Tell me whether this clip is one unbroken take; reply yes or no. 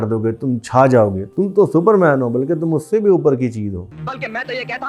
yes